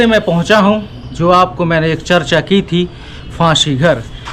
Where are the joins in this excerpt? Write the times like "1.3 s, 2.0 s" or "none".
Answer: none

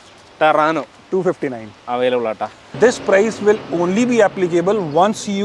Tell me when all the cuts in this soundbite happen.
2.6 s

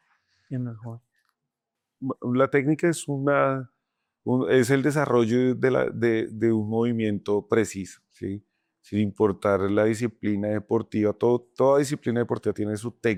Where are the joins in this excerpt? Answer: none

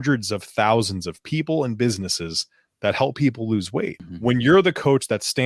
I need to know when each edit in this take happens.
4.0 s

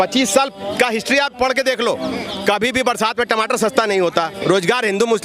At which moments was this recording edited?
4.3 s

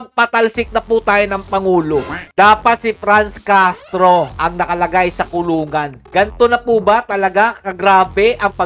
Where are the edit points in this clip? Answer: 2.2 s, 4.3 s, 6.0 s

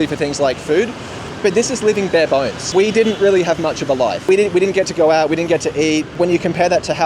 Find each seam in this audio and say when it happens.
1.3 s, 2.6 s, 4.2 s, 6.1 s

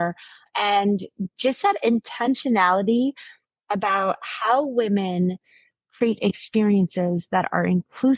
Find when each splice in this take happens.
none

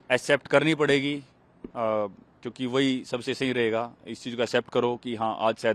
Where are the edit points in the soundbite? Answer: none

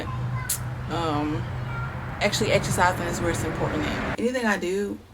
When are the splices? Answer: 4.1 s

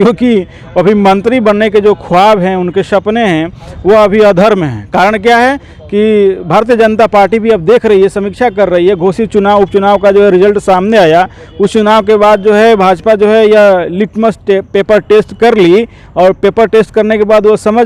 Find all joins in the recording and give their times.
none

